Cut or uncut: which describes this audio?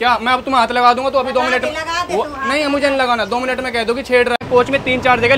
cut